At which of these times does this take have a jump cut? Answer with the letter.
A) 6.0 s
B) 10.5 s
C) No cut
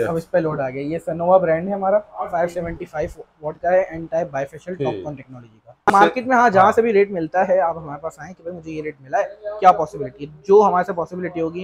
A